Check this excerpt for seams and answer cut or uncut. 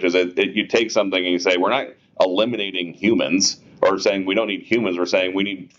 uncut